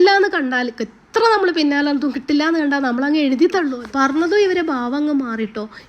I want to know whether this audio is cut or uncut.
cut